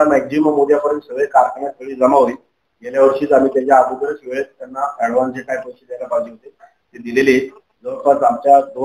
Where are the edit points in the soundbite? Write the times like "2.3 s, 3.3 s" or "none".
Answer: none